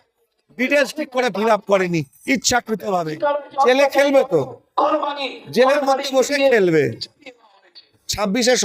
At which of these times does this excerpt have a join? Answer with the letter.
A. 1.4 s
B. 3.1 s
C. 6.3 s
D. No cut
B